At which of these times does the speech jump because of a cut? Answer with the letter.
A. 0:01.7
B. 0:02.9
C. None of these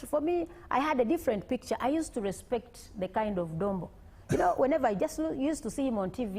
C